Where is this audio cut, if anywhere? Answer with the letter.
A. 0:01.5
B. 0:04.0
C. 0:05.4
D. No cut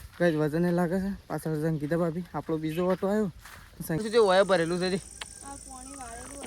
B